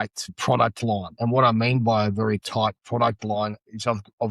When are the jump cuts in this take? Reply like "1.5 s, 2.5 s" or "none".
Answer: 1.1 s

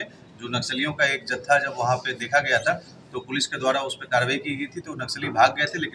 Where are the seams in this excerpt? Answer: none

